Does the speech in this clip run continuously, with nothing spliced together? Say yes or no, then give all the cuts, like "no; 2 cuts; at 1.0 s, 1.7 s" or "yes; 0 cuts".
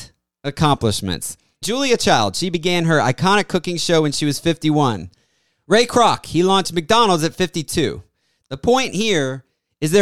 yes; 0 cuts